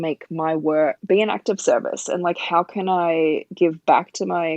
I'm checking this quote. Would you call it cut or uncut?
cut